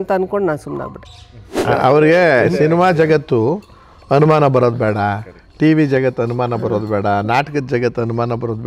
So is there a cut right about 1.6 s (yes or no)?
yes